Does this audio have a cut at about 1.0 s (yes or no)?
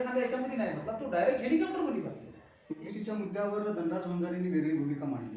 no